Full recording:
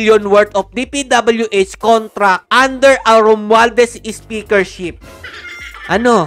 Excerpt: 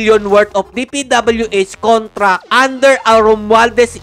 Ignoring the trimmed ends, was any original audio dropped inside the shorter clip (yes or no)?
no